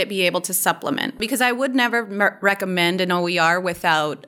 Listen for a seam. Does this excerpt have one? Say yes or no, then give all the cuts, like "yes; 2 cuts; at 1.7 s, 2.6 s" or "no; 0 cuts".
yes; 1 cut; at 1.2 s